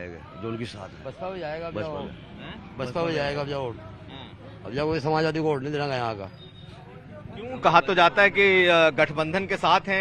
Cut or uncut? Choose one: uncut